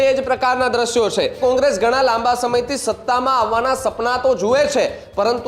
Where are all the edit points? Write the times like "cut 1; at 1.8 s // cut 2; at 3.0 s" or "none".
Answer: cut 1; at 1.4 s